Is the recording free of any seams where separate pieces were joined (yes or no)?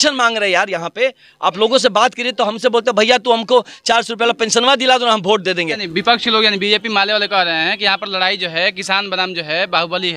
no